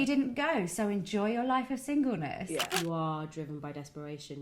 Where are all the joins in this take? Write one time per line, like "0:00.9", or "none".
0:02.6